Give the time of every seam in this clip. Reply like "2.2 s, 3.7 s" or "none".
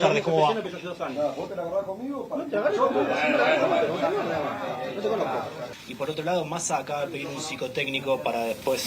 5.7 s